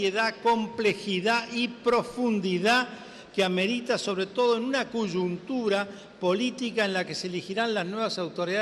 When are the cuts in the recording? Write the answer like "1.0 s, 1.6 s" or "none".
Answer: 5.4 s